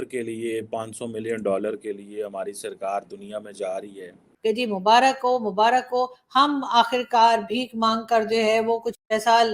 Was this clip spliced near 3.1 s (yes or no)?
no